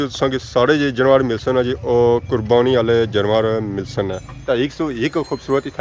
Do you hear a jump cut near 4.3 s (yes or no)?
yes